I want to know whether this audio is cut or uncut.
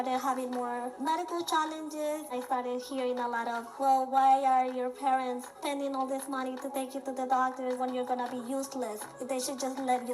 cut